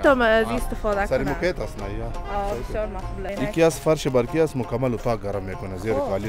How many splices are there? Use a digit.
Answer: 1